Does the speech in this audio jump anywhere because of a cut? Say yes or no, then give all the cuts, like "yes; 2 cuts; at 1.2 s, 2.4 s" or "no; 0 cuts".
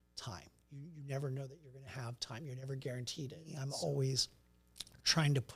yes; 1 cut; at 3.6 s